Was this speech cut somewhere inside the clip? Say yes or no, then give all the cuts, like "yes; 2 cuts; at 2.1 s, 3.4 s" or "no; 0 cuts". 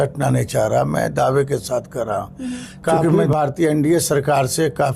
yes; 1 cut; at 3.1 s